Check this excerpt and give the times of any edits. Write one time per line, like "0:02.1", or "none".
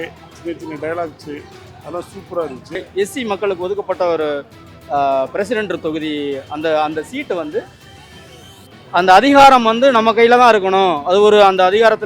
0:02.7